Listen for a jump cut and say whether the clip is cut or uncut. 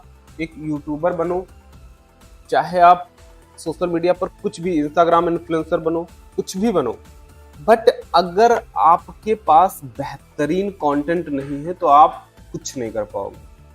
uncut